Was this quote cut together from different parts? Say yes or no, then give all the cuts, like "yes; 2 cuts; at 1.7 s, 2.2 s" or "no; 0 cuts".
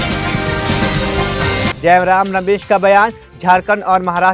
yes; 1 cut; at 1.7 s